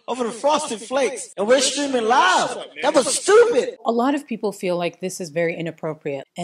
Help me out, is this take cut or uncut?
uncut